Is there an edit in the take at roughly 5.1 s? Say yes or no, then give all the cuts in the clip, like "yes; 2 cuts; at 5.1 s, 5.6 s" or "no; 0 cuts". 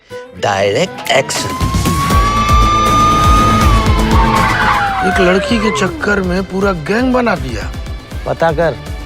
yes; 1 cut; at 5.1 s